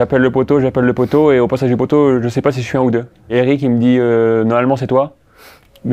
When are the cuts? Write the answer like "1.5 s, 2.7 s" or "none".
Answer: 3.3 s

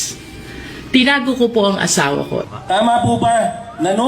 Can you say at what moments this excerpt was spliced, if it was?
2.5 s

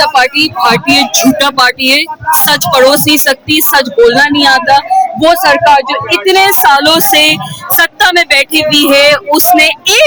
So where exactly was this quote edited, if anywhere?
none

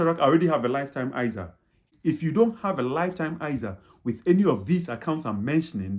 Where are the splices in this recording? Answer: 1.9 s

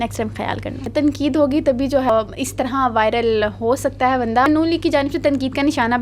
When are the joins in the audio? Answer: 0.8 s, 2.1 s, 4.5 s

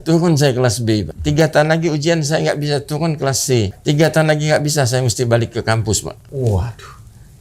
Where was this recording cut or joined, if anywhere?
1.1 s, 3.7 s, 6.2 s

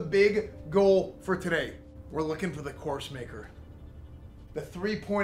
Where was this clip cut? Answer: none

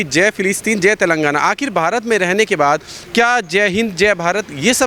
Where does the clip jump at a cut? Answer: none

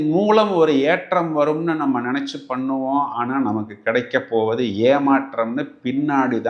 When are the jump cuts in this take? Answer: none

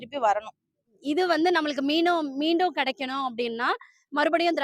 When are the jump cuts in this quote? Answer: 0.9 s

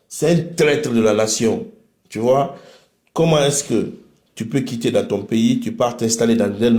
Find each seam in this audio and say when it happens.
none

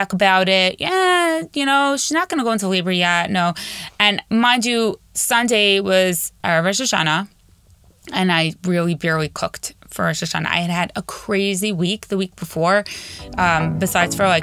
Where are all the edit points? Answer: 6.3 s

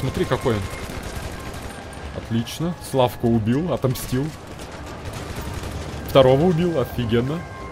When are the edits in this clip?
none

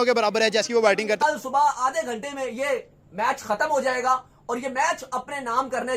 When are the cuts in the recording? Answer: 1.2 s

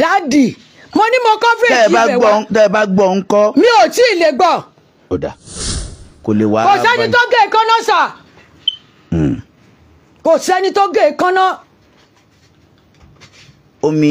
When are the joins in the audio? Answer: 5.7 s

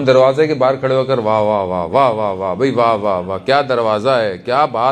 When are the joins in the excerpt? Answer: none

